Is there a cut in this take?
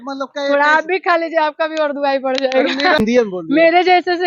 yes; 1 cut; at 3.0 s

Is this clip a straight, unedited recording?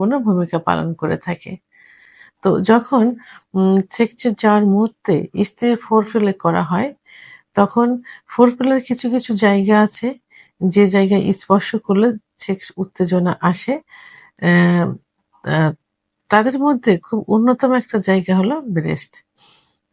yes; 0 cuts

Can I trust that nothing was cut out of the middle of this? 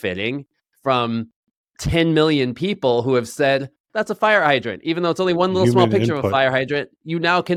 yes; 0 cuts

